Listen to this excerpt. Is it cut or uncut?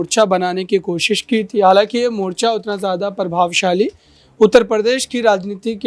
uncut